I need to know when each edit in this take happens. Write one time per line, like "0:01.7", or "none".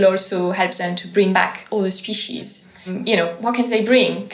0:01.3
0:02.9